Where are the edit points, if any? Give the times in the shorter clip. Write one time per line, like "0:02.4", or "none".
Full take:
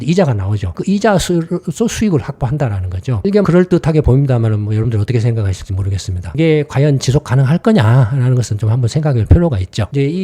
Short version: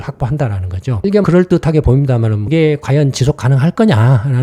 0:02.4